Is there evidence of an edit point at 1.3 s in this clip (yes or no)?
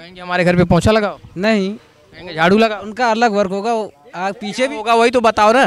no